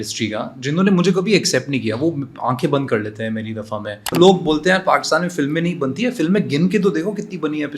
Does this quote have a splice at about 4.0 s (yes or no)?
yes